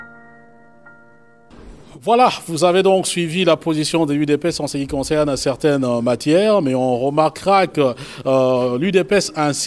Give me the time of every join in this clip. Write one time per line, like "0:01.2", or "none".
0:01.3